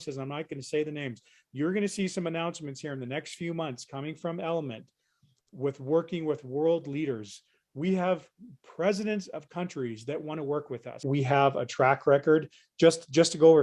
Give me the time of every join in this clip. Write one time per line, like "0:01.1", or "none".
0:11.0